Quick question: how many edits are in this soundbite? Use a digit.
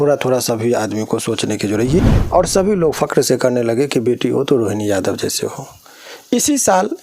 1